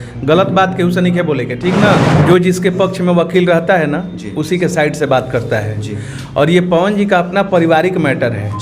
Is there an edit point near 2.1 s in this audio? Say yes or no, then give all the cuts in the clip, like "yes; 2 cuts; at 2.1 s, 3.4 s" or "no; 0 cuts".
yes; 1 cut; at 2.1 s